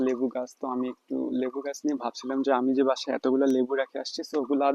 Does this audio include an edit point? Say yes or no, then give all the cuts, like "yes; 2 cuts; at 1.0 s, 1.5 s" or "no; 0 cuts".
no; 0 cuts